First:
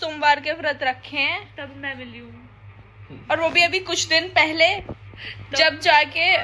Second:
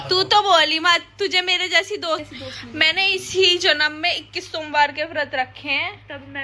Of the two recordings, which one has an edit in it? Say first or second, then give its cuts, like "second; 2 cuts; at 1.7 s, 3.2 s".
second; 1 cut; at 2.3 s